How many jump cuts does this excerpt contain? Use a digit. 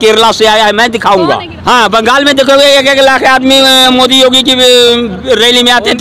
1